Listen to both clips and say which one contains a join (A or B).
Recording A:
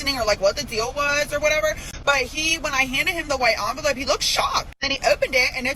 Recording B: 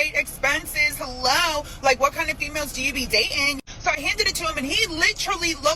A